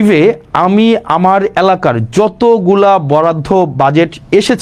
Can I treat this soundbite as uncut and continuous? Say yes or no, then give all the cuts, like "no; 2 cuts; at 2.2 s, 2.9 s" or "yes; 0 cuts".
yes; 0 cuts